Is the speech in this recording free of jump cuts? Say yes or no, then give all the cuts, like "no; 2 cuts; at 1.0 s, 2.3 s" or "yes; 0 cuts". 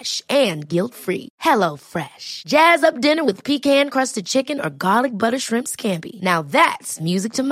yes; 0 cuts